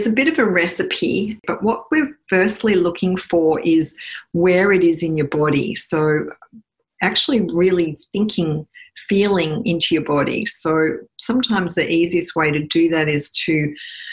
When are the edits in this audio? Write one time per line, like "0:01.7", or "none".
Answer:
0:01.4